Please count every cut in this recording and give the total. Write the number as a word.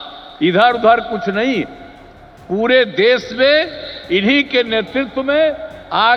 zero